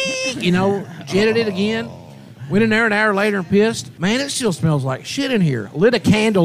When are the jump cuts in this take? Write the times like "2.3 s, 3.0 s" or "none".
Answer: 3.9 s